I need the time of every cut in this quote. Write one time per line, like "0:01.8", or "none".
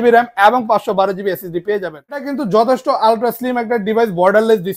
0:02.3